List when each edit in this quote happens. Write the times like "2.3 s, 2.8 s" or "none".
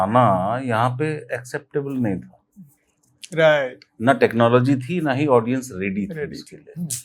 none